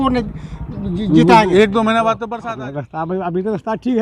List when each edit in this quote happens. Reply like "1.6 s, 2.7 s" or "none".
2.3 s